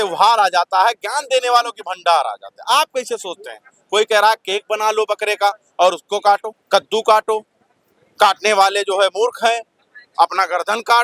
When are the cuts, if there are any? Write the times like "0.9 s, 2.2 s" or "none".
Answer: none

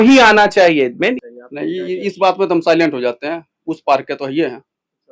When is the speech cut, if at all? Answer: 1.2 s

